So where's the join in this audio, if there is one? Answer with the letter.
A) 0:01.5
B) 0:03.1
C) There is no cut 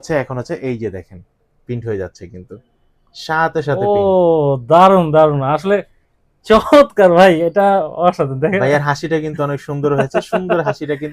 C